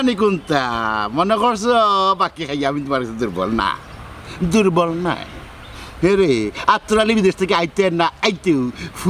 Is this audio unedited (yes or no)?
yes